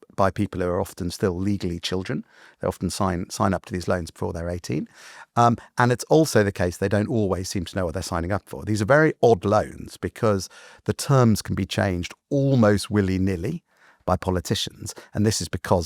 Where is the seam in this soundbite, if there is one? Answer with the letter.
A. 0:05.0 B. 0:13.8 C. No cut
C